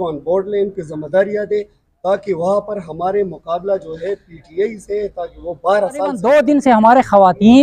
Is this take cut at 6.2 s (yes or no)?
yes